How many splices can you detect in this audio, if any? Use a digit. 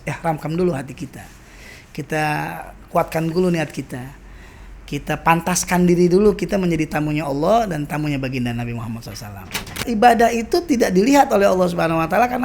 1